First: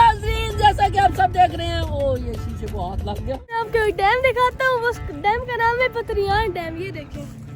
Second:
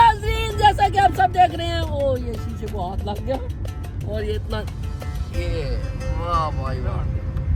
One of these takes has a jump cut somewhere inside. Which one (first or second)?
first